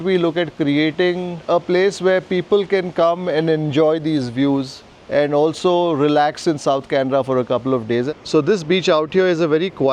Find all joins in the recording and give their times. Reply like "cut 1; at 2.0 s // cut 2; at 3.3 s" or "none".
cut 1; at 1.4 s // cut 2; at 8.1 s